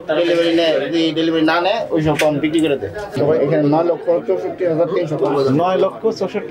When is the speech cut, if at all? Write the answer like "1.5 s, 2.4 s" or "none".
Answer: 3.2 s